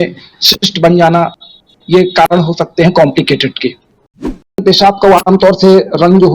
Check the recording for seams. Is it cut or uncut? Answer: cut